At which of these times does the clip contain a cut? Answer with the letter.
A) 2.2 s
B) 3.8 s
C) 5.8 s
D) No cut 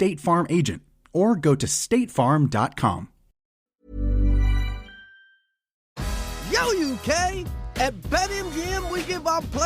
C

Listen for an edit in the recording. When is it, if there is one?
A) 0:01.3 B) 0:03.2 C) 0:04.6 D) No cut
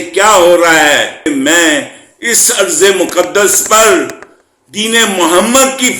A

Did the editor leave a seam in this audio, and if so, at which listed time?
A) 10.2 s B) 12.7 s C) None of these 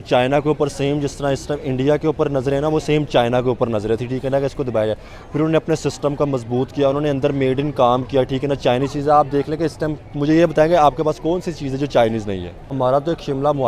B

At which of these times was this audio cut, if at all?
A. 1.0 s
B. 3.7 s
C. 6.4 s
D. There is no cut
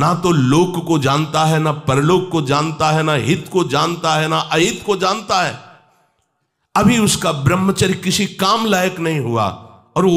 D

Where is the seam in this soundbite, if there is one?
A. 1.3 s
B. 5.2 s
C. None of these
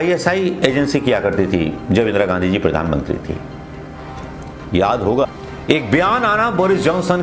B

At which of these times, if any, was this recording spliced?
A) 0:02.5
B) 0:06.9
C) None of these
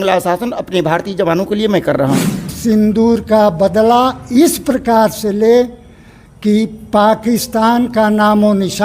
A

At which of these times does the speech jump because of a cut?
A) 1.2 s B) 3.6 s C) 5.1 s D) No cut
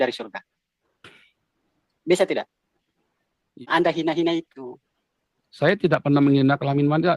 B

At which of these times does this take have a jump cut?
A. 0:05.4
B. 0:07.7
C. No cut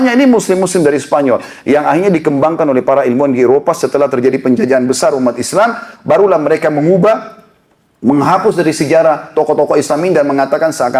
C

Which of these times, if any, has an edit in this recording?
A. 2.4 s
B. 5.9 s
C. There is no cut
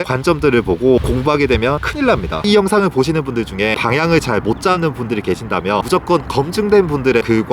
A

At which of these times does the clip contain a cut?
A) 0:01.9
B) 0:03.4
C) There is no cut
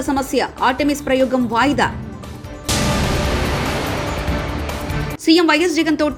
C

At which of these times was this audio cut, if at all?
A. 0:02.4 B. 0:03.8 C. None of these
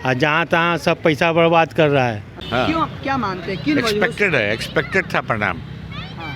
A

